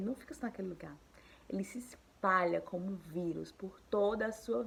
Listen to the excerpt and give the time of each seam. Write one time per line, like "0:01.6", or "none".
none